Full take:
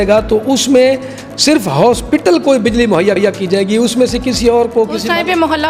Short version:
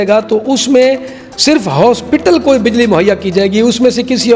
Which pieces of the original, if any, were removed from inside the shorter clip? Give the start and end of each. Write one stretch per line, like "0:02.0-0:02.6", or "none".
0:03.1-0:03.3